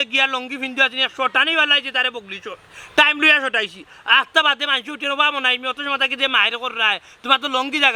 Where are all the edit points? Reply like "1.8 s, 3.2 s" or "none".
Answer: none